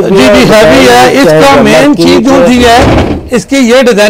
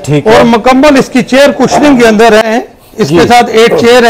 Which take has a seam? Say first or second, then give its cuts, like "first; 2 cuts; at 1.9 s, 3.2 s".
second; 1 cut; at 2.5 s